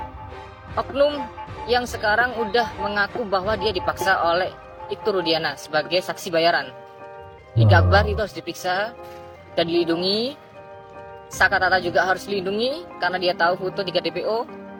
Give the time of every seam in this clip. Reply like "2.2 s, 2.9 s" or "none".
none